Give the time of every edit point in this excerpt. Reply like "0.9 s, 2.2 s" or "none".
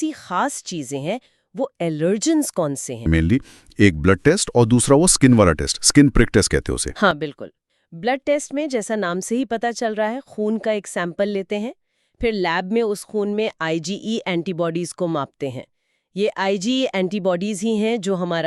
3.1 s

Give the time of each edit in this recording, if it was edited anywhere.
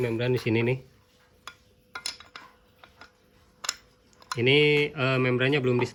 none

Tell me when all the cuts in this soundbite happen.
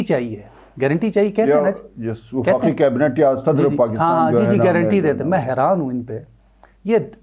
none

